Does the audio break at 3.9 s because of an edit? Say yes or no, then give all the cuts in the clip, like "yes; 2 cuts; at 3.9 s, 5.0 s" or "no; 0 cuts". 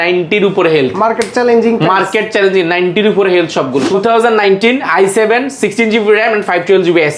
yes; 1 cut; at 3.9 s